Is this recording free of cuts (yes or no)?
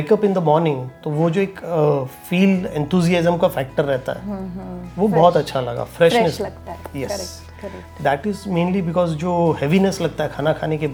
yes